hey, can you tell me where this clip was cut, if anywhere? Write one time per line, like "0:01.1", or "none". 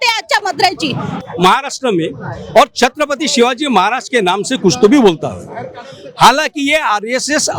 0:01.2